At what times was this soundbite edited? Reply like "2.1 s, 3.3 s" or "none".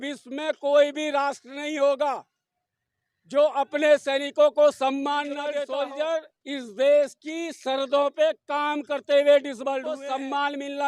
5.5 s, 10.0 s